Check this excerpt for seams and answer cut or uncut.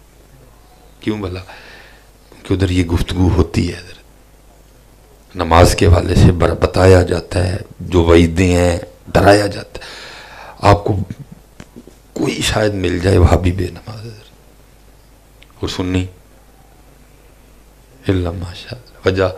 uncut